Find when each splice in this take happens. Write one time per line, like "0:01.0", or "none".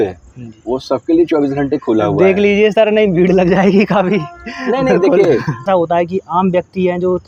0:05.7